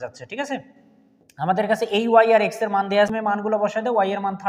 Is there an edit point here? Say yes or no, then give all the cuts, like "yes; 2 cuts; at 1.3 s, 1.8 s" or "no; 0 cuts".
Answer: yes; 1 cut; at 3.1 s